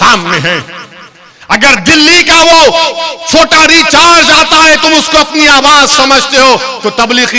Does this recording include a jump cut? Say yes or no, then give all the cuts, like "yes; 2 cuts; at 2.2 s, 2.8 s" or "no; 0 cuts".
no; 0 cuts